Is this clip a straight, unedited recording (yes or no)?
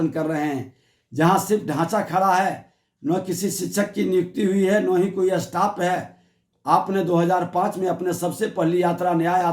no